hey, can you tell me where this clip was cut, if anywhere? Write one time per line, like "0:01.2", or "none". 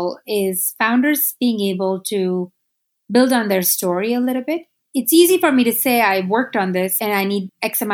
0:04.8
0:07.0

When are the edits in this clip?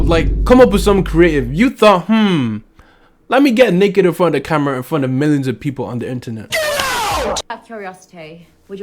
0:07.6

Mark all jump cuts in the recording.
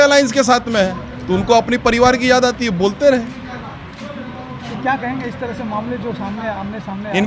none

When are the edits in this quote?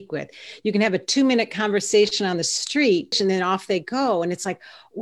0:03.2

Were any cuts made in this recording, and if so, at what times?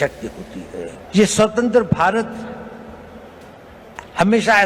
0:01.0

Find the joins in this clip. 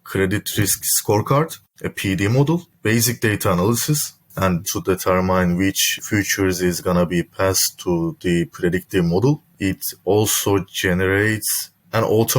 0:02.7
0:04.6
0:05.9
0:09.5

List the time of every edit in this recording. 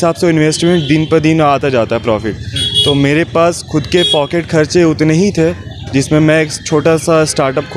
none

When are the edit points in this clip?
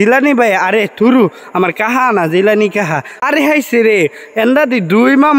0:03.1

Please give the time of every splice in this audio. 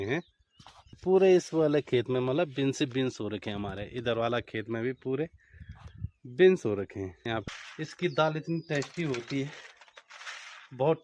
0:01.0
0:07.5

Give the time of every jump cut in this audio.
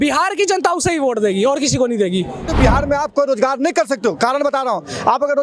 0:02.5

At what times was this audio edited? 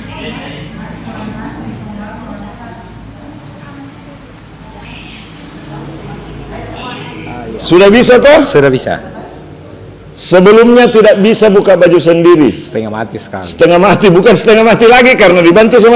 none

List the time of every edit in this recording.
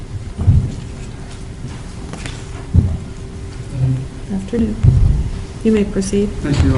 0:05.8

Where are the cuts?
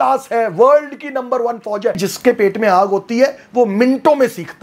0:02.0

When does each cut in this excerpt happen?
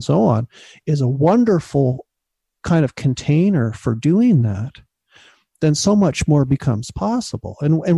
none

